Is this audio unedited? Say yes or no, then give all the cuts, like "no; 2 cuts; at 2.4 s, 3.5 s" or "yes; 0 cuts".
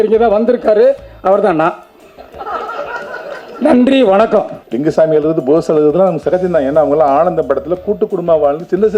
no; 1 cut; at 4.6 s